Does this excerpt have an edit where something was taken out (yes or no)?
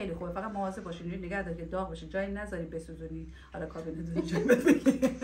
no